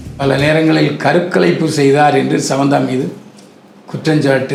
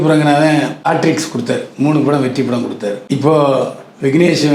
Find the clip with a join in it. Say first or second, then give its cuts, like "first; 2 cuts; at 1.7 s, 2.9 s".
second; 2 cuts; at 0.8 s, 3.0 s